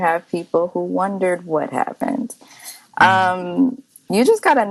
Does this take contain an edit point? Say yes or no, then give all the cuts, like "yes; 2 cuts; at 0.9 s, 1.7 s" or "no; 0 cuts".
no; 0 cuts